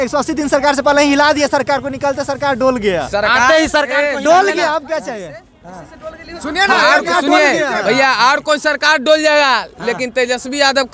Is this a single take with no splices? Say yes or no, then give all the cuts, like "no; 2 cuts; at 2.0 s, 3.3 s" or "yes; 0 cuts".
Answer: yes; 0 cuts